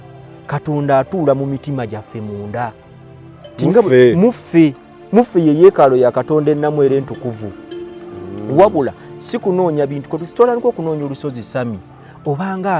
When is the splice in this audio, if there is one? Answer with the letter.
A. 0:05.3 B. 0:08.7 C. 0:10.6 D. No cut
D